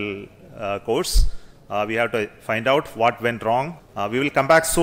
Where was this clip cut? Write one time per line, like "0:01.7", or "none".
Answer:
0:03.8

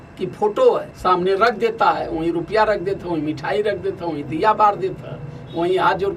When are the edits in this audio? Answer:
0:00.9

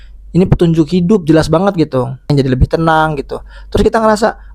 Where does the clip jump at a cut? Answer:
0:02.3

